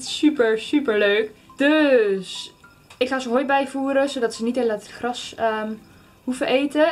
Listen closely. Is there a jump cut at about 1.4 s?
yes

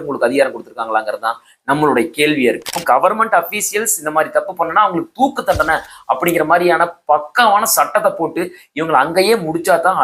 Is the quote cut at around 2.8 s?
yes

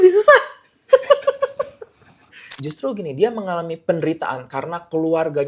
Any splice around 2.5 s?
yes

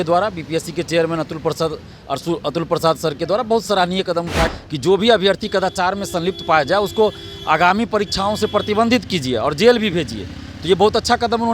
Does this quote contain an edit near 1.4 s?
no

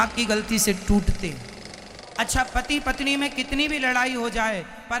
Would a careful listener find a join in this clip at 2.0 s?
yes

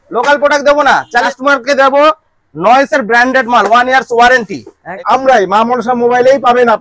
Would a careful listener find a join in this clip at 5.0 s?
yes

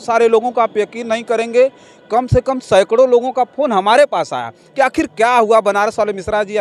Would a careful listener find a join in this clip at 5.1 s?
no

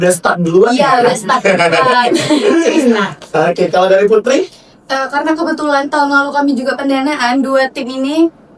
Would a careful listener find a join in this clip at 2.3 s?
no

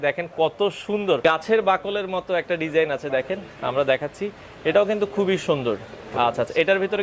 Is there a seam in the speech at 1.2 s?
yes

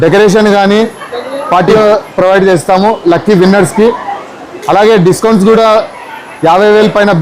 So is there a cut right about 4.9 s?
no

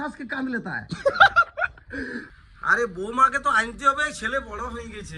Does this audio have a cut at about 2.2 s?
yes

